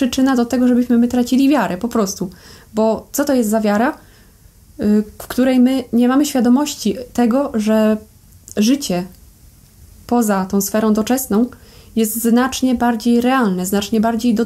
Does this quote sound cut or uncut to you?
uncut